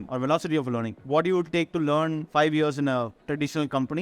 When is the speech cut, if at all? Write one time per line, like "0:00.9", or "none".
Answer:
0:01.0
0:02.2